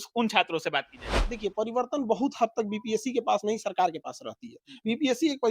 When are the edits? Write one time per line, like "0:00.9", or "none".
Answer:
0:01.0